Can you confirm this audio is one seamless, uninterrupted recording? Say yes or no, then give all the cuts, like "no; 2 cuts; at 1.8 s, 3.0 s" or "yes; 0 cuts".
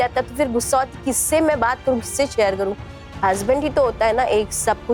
yes; 0 cuts